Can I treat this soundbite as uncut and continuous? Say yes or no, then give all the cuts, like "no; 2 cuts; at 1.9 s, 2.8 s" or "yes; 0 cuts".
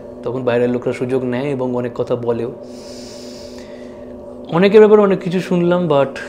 yes; 0 cuts